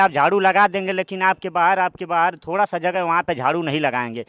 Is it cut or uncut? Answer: uncut